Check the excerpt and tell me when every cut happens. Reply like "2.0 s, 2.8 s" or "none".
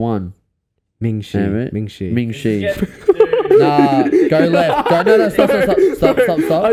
none